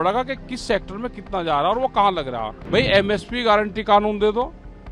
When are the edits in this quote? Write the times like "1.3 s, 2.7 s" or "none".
2.6 s